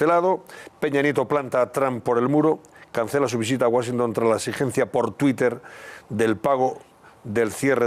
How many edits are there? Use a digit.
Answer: 1